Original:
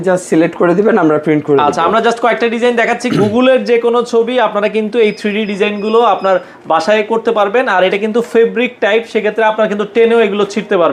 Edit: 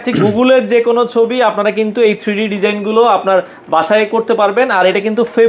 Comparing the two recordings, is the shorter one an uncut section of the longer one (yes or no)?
yes